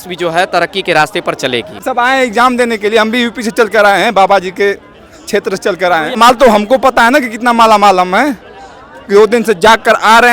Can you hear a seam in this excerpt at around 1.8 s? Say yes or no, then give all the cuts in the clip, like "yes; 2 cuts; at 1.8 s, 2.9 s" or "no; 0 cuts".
yes; 2 cuts; at 1.8 s, 6.2 s